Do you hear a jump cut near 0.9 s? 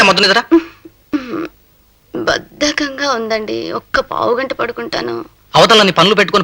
yes; 1 cut; at 0.9 s

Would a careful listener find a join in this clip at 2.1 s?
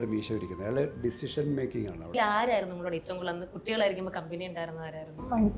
yes; 1 cut; at 2.1 s

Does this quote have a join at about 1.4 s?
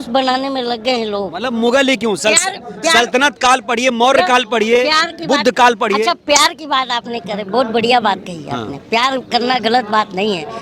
yes; 1 cut; at 1.4 s

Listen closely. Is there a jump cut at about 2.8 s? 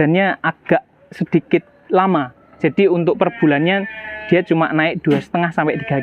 no; 0 cuts

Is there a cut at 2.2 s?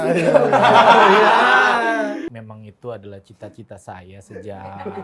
yes; 1 cut; at 2.2 s

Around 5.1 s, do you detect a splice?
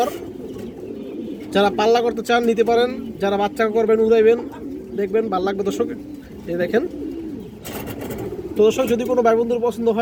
no; 0 cuts

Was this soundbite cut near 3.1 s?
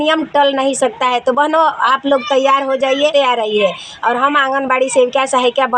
yes; 1 cut; at 3.1 s

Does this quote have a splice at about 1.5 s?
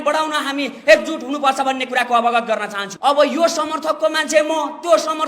no; 1 cut; at 2.8 s

